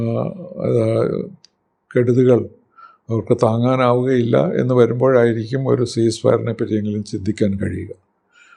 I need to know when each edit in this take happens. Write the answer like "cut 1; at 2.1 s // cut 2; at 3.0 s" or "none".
none